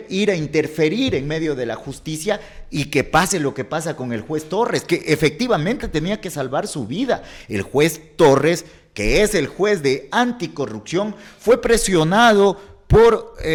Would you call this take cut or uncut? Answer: uncut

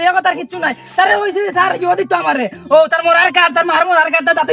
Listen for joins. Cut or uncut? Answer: uncut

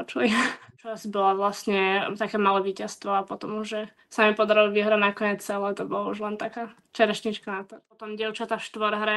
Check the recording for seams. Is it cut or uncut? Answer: cut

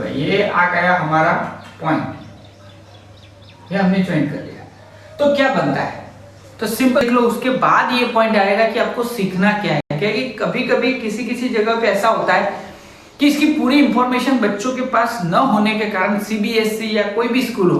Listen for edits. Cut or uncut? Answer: cut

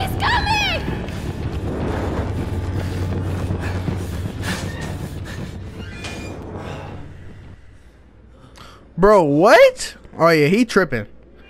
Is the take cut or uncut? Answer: uncut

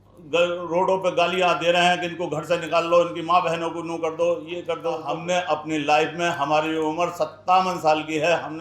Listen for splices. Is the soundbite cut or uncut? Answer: cut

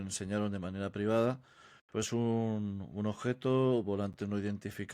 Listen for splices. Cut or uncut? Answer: uncut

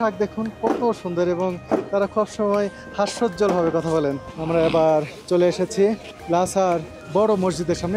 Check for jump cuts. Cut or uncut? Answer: cut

